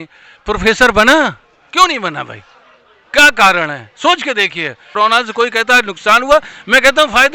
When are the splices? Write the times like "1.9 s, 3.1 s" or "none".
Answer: 4.8 s